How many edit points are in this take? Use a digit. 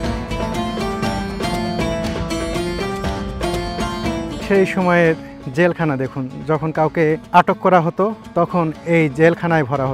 3